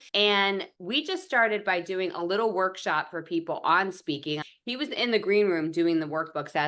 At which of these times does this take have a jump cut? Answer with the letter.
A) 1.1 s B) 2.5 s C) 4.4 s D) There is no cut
C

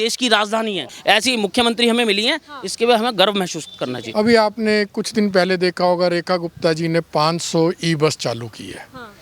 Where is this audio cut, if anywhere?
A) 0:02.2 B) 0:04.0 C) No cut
B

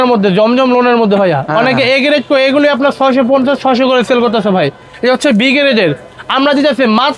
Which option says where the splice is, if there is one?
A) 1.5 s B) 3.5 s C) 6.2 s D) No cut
D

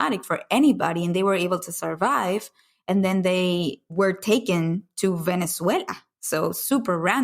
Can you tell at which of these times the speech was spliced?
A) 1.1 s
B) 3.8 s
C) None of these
B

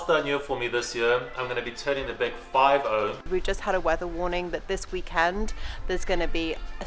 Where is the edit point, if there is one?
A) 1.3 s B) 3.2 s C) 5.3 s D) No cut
B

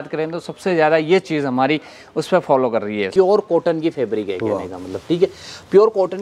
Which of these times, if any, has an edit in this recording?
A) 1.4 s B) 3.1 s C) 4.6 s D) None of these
B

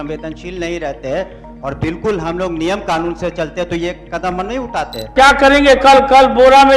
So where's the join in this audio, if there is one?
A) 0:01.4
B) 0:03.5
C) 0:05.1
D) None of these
C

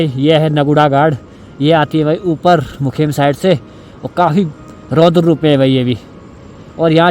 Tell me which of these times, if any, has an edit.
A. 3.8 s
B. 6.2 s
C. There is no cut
C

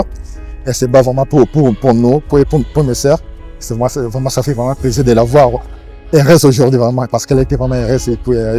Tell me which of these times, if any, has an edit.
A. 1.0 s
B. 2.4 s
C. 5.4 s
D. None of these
D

